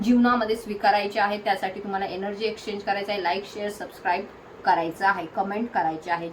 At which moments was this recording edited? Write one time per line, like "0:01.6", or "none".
none